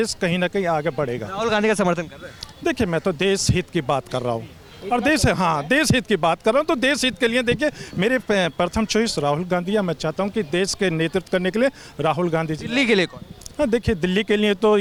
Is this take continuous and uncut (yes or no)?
yes